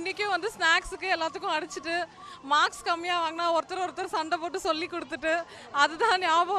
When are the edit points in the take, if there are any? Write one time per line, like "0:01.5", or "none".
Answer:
none